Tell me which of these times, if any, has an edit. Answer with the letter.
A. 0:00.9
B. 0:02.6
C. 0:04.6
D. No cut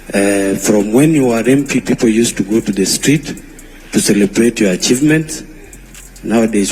C